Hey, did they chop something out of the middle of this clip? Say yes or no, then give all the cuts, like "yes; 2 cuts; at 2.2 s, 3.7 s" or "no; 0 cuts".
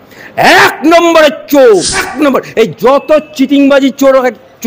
yes; 1 cut; at 2.1 s